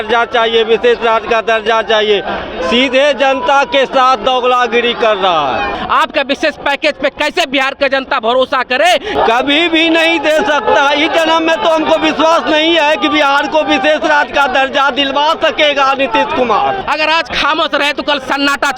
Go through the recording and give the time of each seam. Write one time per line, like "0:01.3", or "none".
0:05.8
0:09.1
0:16.8